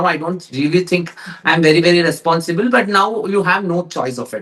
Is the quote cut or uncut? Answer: uncut